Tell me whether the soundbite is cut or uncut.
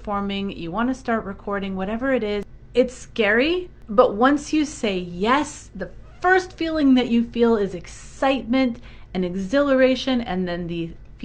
cut